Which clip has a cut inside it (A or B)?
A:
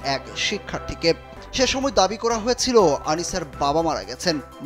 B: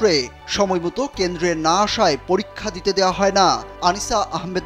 A